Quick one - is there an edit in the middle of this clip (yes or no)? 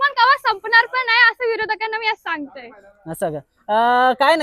no